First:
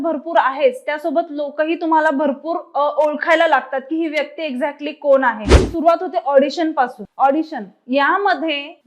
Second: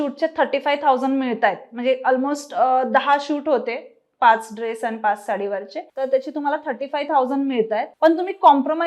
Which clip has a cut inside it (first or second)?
first